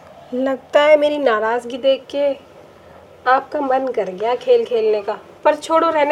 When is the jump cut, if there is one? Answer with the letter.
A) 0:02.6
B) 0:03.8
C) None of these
C